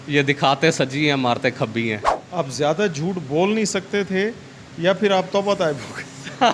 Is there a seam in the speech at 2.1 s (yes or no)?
yes